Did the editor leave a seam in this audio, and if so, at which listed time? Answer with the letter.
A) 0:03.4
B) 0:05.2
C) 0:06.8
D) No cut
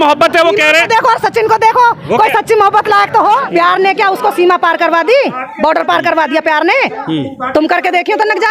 A